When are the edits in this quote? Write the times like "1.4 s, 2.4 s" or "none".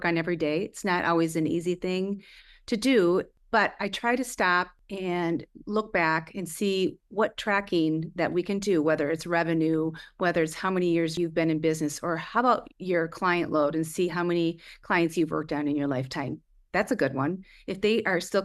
3.4 s, 4.8 s, 7.0 s, 11.1 s